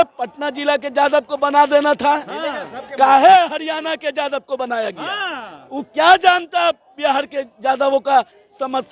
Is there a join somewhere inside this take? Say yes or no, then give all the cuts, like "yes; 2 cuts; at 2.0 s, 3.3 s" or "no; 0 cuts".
no; 0 cuts